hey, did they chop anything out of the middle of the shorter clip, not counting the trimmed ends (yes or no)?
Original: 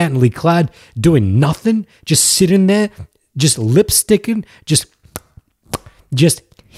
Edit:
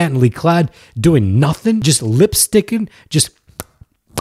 yes